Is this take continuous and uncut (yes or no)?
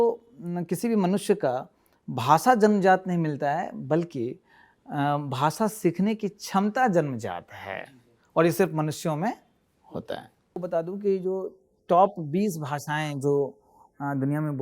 no